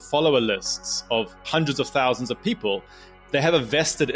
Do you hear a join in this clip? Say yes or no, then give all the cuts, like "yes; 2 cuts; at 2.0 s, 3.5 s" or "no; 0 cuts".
yes; 2 cuts; at 1.4 s, 3.1 s